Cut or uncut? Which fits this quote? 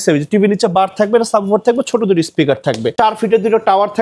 cut